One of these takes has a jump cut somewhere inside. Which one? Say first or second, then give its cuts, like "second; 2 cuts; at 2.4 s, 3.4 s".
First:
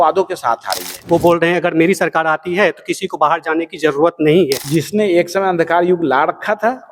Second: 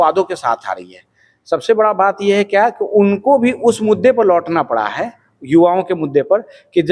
first; 2 cuts; at 0.9 s, 4.6 s